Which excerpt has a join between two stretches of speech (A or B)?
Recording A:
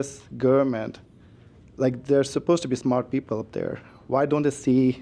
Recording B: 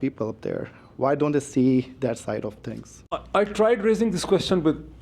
B